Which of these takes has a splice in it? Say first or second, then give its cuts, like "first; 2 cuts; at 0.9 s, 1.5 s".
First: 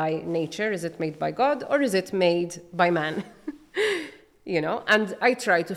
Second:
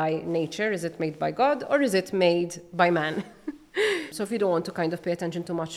second; 1 cut; at 4.2 s